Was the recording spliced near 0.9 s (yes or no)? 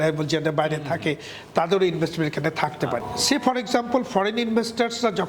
no